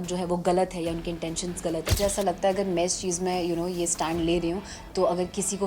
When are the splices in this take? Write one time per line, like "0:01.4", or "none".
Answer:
0:01.9